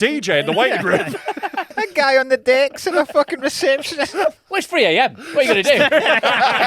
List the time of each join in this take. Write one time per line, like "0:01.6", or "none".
0:01.7
0:04.4